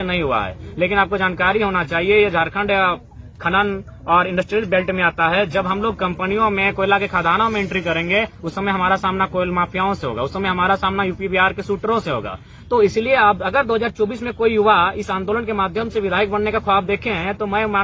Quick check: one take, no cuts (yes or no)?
yes